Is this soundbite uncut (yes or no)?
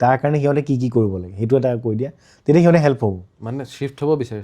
yes